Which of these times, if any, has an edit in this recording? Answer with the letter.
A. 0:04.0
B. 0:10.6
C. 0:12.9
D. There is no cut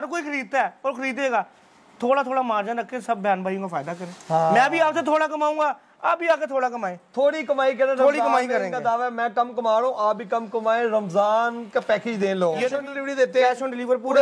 C